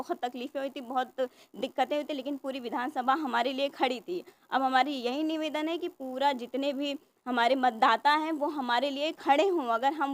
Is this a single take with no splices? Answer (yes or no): yes